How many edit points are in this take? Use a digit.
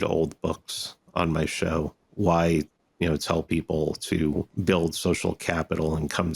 2